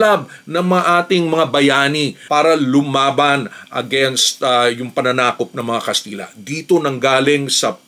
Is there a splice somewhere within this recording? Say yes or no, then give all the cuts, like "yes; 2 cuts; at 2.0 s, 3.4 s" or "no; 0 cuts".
no; 0 cuts